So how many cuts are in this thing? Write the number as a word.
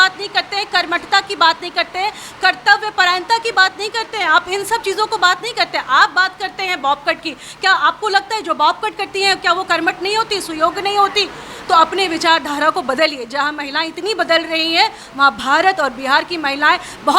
zero